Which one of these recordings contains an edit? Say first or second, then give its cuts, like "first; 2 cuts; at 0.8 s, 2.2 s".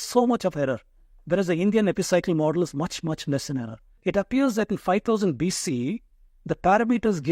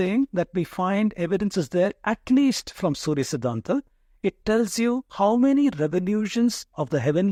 first; 1 cut; at 4.0 s